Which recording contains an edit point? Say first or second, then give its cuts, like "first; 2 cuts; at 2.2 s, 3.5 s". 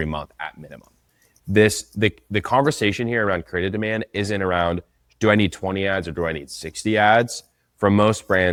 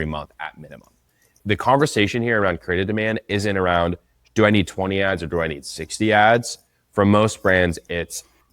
second; 1 cut; at 1.4 s